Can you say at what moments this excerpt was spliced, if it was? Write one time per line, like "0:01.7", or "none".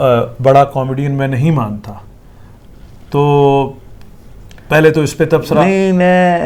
none